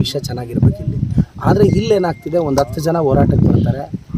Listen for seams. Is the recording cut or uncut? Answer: uncut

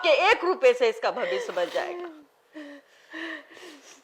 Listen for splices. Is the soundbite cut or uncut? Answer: uncut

